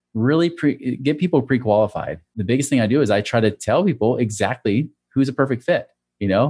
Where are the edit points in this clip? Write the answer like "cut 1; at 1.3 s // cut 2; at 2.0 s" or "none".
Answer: cut 1; at 2.3 s